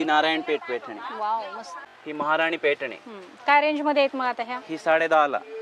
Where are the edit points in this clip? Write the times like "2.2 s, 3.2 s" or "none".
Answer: 1.7 s